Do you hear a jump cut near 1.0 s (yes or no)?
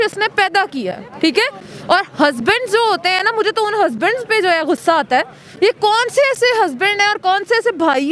yes